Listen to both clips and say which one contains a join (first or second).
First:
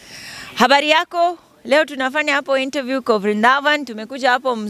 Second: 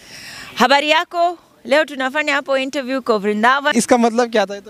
second